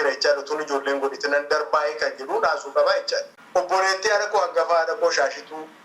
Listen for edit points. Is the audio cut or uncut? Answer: cut